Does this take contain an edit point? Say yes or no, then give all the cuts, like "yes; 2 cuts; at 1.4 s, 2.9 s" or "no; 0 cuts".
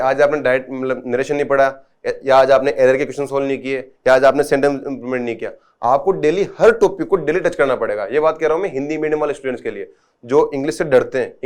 no; 0 cuts